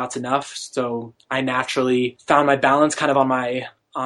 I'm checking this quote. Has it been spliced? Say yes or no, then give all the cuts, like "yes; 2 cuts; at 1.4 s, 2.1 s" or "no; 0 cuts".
yes; 1 cut; at 2.2 s